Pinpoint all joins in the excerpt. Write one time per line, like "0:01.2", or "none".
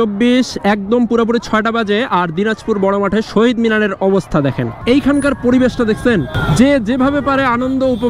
0:04.8
0:06.4